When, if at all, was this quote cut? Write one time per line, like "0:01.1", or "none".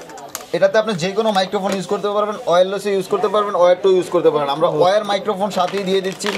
none